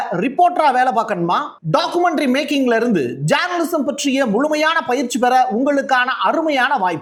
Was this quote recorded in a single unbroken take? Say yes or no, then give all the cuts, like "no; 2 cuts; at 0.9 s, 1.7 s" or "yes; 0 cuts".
yes; 0 cuts